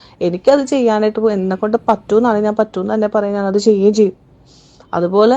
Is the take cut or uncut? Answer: uncut